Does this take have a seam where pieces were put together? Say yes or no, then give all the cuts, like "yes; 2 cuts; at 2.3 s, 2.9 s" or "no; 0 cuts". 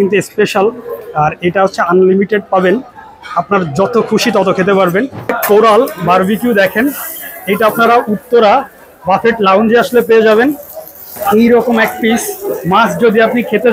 yes; 2 cuts; at 5.2 s, 11.2 s